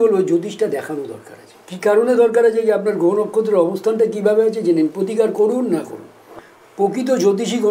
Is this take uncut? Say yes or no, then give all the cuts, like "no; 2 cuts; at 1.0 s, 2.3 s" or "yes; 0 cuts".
no; 1 cut; at 6.4 s